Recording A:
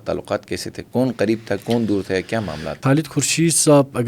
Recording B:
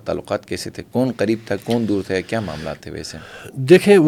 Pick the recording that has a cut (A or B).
A